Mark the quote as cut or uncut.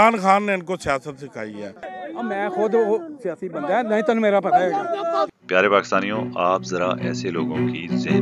cut